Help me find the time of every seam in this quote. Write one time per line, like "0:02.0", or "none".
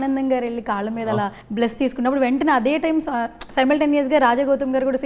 0:01.4